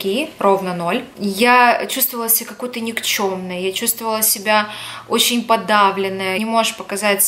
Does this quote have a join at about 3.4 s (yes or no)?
no